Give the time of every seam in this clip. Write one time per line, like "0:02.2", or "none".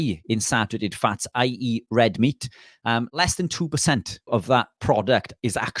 0:04.5